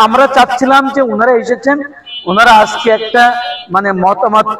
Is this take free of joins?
yes; 0 cuts

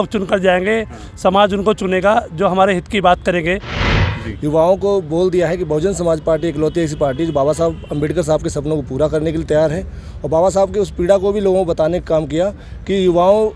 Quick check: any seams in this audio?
yes; 1 cut; at 4.1 s

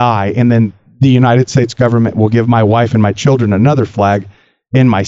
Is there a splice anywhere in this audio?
no; 0 cuts

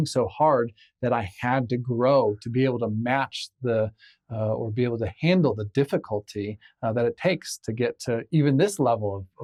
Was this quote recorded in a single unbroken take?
yes; 0 cuts

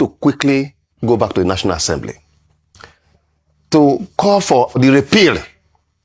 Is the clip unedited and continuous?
no; 1 cut; at 4.8 s

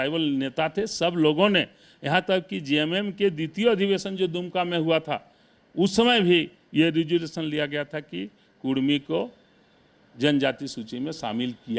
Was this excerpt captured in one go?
yes; 0 cuts

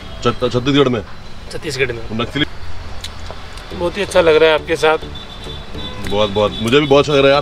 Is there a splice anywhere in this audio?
yes; 1 cut; at 2.4 s

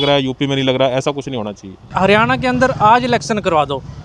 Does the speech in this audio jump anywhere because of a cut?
yes; 1 cut; at 1.8 s

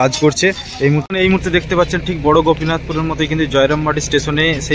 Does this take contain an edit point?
yes; 1 cut; at 1.1 s

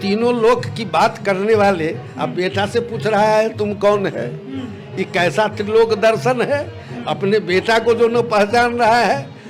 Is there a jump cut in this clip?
no; 0 cuts

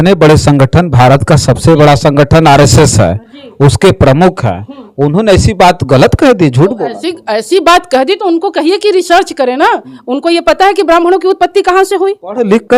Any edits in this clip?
no; 0 cuts

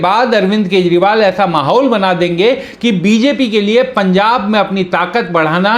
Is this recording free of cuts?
yes; 0 cuts

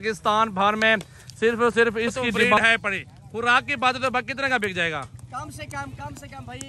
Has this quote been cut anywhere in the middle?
yes; 1 cut; at 2.6 s

